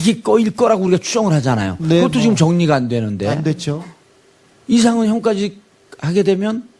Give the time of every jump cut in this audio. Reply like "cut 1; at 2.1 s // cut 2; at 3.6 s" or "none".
none

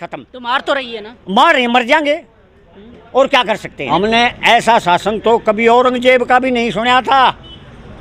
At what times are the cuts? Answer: cut 1; at 3.7 s

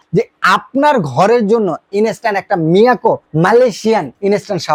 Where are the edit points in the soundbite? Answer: none

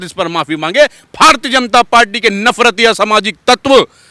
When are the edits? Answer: none

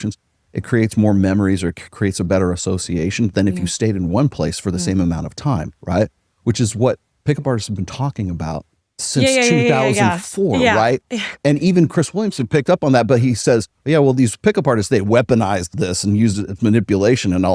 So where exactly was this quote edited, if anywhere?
cut 1; at 11.4 s

